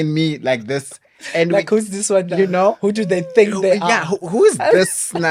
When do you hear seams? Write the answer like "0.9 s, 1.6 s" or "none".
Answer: none